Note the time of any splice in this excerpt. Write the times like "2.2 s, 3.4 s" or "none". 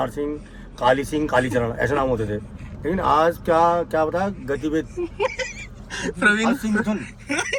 none